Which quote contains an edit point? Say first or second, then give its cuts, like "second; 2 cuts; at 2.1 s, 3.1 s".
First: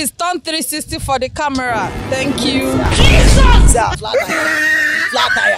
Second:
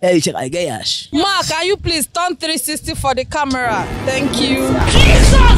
second; 1 cut; at 1.0 s